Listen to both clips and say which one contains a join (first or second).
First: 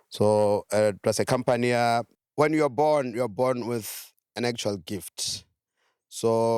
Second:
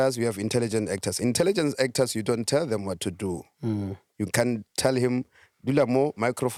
first